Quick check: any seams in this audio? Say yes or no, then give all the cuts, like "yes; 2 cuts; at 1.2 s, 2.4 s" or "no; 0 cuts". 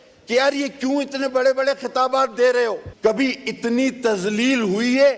yes; 1 cut; at 2.9 s